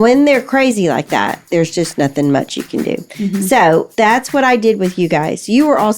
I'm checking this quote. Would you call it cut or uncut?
cut